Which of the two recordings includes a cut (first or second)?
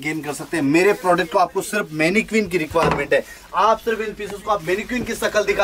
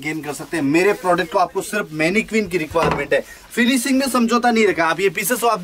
second